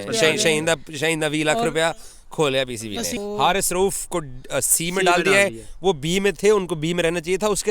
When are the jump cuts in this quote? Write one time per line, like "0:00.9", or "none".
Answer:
0:03.1